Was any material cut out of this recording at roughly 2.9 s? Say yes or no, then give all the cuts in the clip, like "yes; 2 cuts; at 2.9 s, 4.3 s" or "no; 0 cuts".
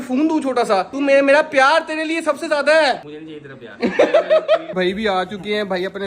no; 1 cut; at 4.7 s